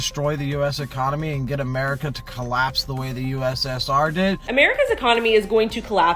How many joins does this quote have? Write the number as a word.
one